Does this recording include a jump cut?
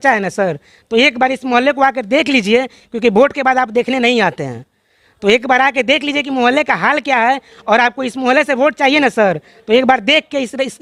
no; 0 cuts

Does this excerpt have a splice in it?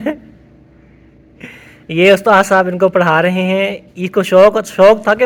no; 0 cuts

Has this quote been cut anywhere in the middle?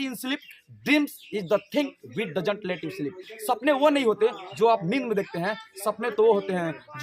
no; 0 cuts

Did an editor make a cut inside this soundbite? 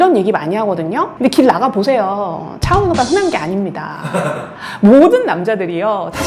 no; 0 cuts

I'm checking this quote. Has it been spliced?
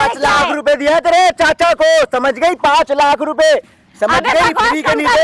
no; 0 cuts

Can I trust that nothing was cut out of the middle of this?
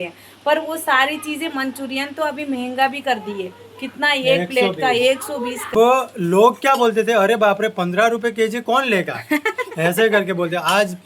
no; 1 cut; at 5.7 s

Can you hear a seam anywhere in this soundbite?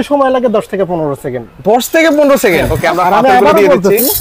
yes; 1 cut; at 2.7 s

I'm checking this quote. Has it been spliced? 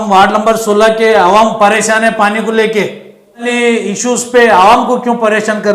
yes; 1 cut; at 3.4 s

